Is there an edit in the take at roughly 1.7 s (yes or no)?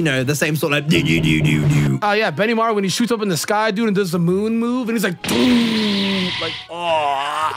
yes